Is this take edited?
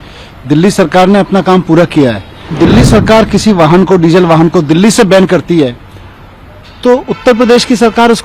yes; 1 cut; at 2.5 s

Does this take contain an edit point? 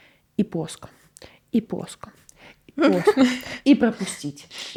no; 0 cuts

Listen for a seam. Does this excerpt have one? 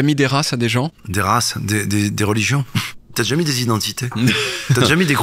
yes; 2 cuts; at 1.0 s, 3.1 s

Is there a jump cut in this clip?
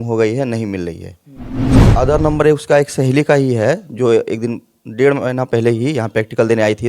yes; 1 cut; at 1.8 s

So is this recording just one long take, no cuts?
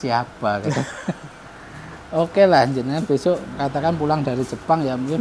yes; 0 cuts

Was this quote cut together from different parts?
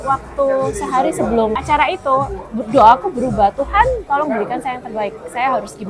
no; 0 cuts

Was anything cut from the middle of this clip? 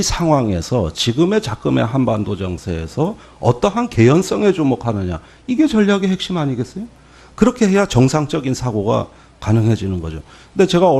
no; 0 cuts

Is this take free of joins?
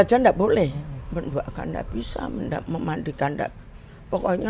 no; 1 cut; at 0.9 s

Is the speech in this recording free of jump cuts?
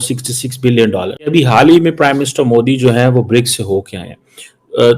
no; 1 cut; at 1.3 s

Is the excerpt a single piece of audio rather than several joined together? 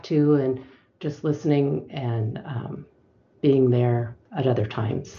no; 1 cut; at 4.2 s

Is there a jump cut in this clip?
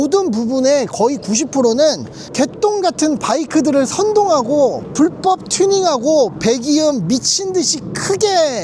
no; 0 cuts

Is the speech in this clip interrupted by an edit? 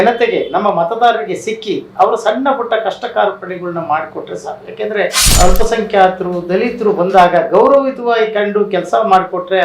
yes; 1 cut; at 5.2 s

